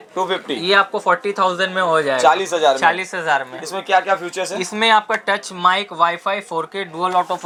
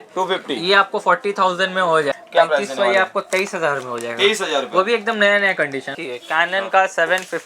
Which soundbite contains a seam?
second; 2 cuts; at 2.1 s, 5.9 s

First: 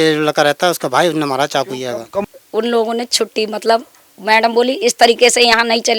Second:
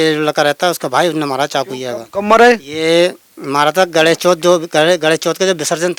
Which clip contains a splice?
first; 1 cut; at 2.2 s

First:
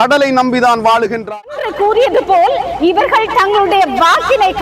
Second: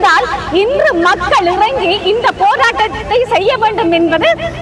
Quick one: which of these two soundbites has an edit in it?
first; 1 cut; at 1.2 s

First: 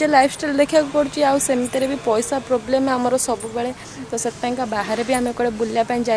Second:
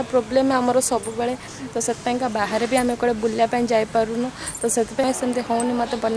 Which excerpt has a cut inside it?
second; 1 cut; at 5.0 s

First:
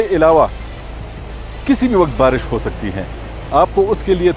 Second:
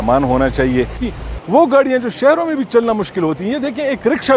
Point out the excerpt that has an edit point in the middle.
second; 1 cut; at 1.1 s

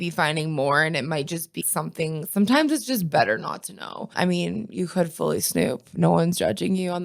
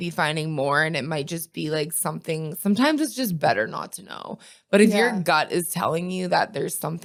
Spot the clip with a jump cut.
first; 2 cuts; at 1.6 s, 4.1 s

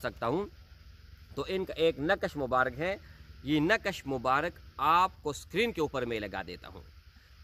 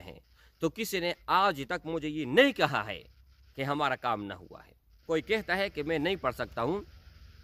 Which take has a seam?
second; 1 cut; at 4.9 s

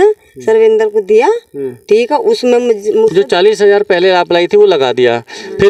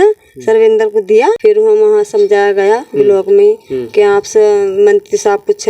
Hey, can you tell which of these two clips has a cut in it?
second; 1 cut; at 1.4 s

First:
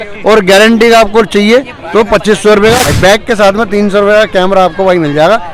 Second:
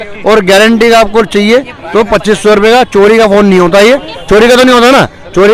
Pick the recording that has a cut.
first; 1 cut; at 2.8 s

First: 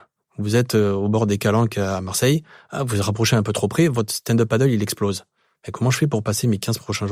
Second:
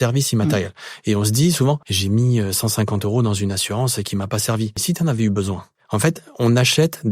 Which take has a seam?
second; 3 cuts; at 1.9 s, 4.8 s, 5.7 s

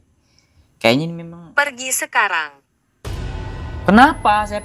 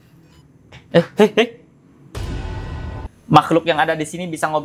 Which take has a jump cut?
second; 1 cut; at 3.1 s

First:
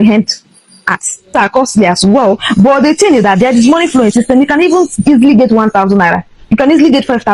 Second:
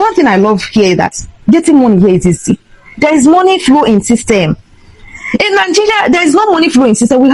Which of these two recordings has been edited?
first; 1 cut; at 1.3 s

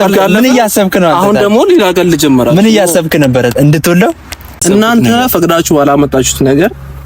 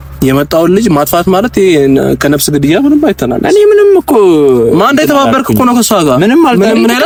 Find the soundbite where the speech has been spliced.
first; 1 cut; at 4.6 s

